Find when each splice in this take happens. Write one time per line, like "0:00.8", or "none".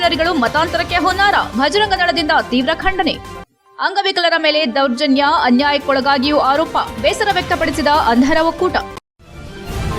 0:09.0